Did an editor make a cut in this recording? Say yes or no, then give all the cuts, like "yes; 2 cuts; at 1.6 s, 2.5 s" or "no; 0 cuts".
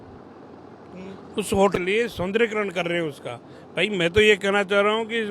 yes; 1 cut; at 1.8 s